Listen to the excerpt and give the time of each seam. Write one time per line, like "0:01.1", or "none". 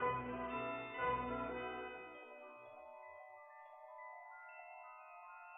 0:02.8